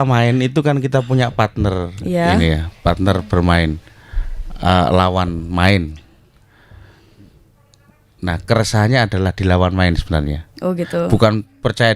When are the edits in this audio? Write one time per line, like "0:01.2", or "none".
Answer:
none